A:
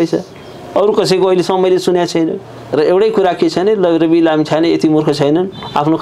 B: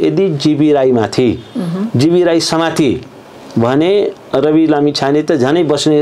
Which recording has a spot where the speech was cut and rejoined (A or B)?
A